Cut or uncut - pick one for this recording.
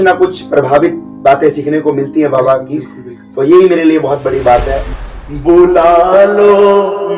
cut